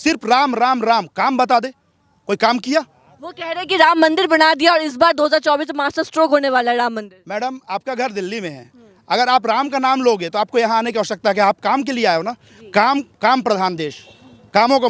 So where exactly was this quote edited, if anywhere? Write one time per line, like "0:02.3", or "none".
none